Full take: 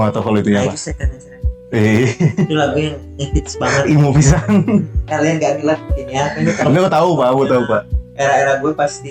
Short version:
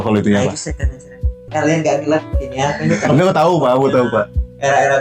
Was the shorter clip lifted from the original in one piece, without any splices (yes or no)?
no